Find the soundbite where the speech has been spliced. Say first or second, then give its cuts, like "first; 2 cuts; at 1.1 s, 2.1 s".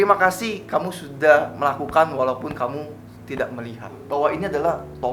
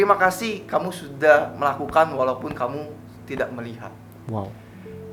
first; 1 cut; at 4.0 s